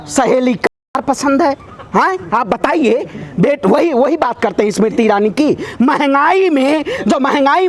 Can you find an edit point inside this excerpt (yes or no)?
no